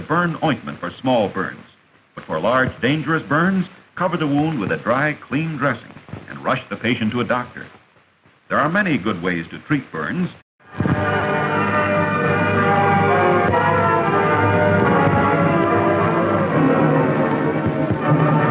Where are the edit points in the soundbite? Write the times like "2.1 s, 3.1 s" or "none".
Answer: none